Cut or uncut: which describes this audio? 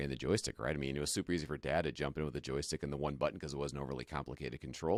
uncut